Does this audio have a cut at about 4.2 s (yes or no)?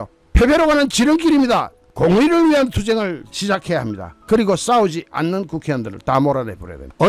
no